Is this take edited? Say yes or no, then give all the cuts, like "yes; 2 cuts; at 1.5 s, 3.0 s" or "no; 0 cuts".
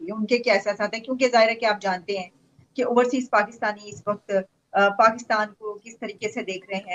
no; 0 cuts